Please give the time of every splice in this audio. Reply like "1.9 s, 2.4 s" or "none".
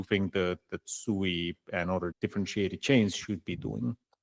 2.1 s